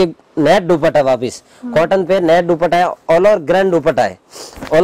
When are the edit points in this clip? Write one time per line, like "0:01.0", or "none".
none